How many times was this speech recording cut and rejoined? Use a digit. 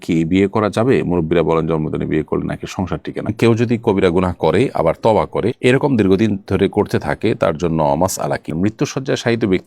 2